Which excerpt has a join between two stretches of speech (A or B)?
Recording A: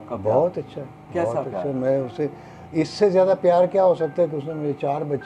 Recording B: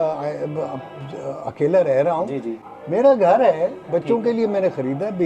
B